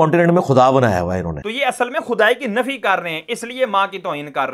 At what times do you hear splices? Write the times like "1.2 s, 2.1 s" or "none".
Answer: 1.4 s